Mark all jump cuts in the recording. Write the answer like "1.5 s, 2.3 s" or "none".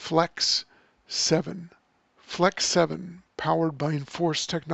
none